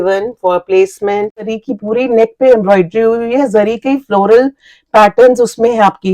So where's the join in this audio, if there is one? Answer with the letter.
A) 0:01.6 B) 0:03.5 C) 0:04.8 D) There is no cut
A